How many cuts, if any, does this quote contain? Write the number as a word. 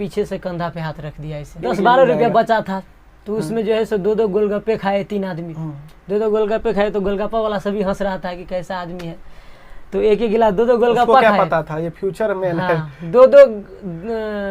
one